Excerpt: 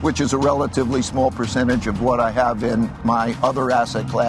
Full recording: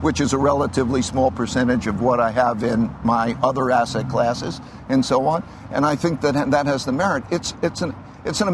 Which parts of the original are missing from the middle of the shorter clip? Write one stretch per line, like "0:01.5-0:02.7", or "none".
none